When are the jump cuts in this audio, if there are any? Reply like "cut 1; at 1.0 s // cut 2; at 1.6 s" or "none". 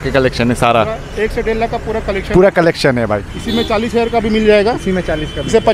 none